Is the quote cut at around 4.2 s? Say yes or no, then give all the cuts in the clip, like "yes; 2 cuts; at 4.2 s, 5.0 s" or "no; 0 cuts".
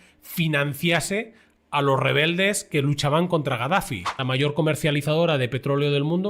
yes; 1 cut; at 4.2 s